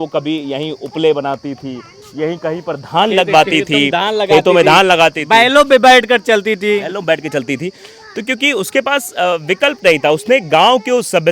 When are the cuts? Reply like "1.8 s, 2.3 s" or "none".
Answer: none